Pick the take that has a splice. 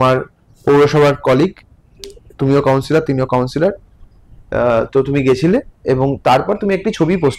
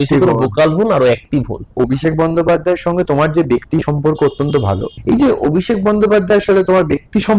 second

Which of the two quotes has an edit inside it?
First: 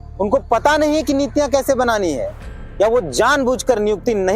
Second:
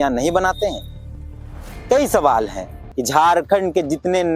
second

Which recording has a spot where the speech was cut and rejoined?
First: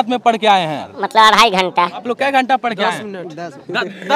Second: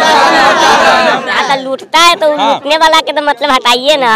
first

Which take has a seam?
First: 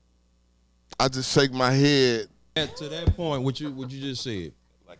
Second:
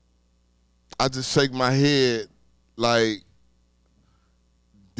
first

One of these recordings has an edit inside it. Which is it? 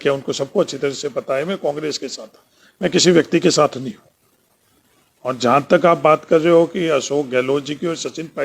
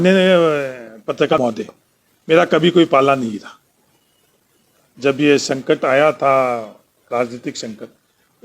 second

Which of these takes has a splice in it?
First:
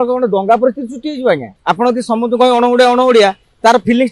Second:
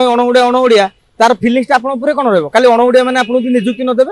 first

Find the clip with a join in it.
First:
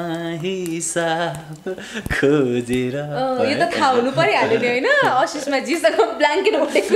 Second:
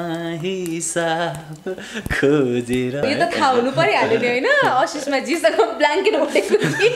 second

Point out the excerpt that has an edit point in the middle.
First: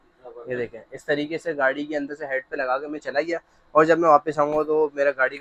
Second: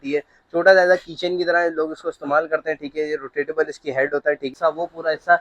second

